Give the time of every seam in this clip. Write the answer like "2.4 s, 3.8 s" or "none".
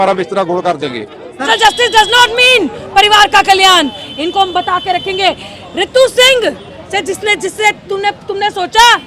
1.5 s